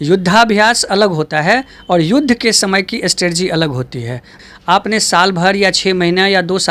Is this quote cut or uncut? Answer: cut